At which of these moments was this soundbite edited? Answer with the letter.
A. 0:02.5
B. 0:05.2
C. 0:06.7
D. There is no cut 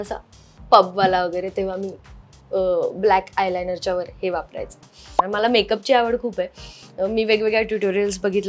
B